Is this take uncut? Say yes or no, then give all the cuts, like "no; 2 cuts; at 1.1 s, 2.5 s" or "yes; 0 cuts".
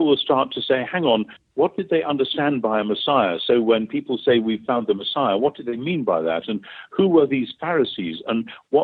yes; 0 cuts